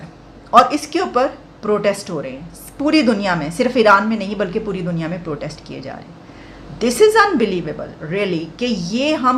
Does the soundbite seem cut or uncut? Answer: uncut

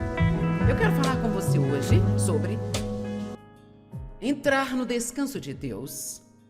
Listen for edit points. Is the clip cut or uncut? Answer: cut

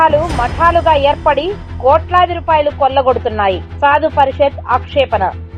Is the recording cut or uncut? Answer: uncut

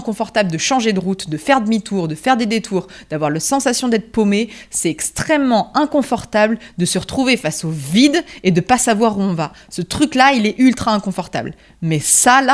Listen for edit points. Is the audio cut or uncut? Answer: uncut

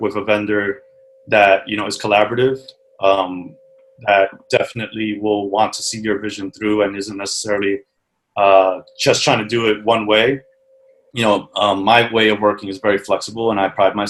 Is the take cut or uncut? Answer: uncut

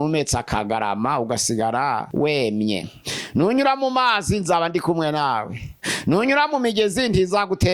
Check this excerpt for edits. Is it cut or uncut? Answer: cut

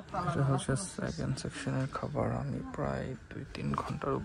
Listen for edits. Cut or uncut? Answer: uncut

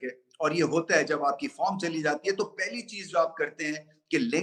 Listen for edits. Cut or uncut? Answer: uncut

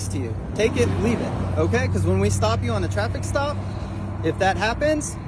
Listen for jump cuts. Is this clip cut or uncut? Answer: uncut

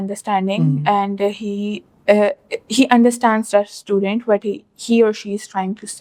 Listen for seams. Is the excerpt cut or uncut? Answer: uncut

